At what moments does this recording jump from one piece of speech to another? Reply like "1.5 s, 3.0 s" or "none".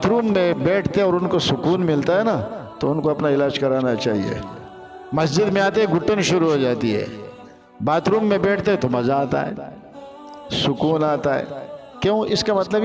none